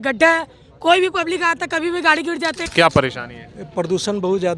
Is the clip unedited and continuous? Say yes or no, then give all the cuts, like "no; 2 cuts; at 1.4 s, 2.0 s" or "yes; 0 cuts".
no; 1 cut; at 2.6 s